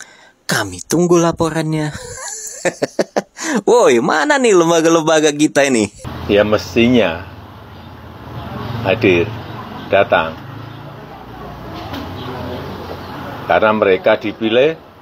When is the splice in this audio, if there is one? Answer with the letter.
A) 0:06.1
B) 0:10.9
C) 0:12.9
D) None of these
A